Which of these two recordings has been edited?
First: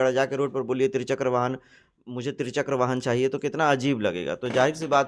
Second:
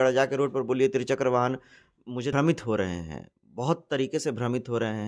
second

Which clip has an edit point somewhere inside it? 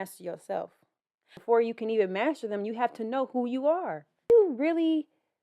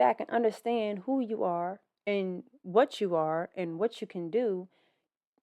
first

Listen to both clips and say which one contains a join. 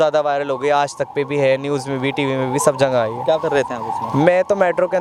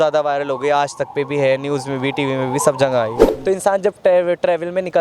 second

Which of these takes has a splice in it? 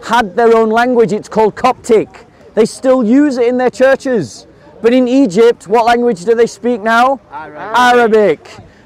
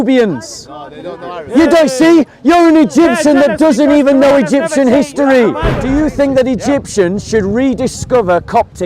second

